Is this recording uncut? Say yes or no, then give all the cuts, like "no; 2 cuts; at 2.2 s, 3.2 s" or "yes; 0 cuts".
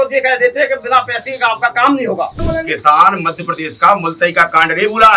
no; 1 cut; at 2.4 s